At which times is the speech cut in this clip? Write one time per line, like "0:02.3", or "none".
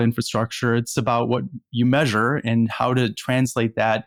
none